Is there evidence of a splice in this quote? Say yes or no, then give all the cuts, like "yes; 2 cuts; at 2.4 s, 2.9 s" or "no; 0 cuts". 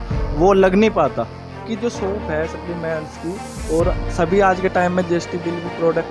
yes; 1 cut; at 1.6 s